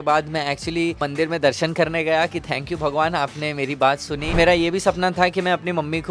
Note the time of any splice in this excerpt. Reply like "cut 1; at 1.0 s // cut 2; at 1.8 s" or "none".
cut 1; at 1.0 s // cut 2; at 4.3 s